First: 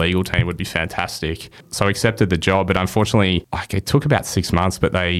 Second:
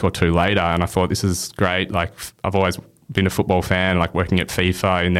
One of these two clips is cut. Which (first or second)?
first